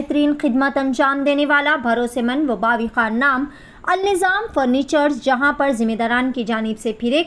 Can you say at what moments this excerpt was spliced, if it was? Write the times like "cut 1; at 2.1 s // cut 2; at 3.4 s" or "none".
none